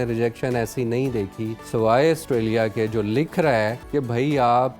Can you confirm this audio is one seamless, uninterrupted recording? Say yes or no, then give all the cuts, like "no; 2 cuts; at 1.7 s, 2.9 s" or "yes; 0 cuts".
no; 2 cuts; at 1.6 s, 3.8 s